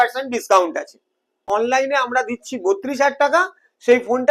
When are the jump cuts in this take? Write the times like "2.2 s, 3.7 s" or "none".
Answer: 1.4 s